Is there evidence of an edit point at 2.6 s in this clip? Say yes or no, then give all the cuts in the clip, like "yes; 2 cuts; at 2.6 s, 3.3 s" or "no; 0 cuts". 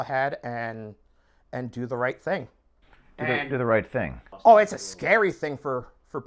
yes; 1 cut; at 2.6 s